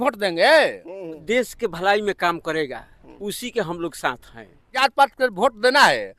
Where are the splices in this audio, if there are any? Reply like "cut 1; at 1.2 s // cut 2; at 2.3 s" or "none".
cut 1; at 1.2 s // cut 2; at 4.8 s